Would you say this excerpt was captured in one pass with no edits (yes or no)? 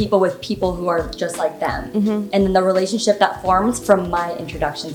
yes